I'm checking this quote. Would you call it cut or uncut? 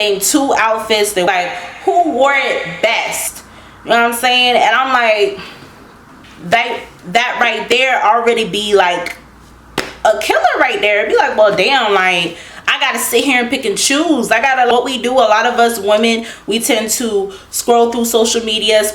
uncut